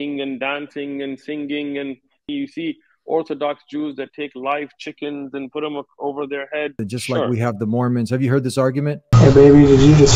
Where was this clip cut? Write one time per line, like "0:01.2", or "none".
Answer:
0:02.3
0:06.8
0:09.1